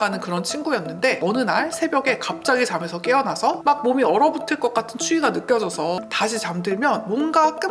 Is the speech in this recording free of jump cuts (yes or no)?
no